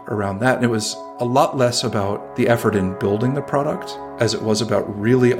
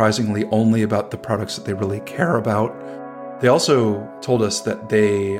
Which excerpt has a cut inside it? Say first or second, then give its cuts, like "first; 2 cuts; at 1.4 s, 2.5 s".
second; 2 cuts; at 2.8 s, 4.1 s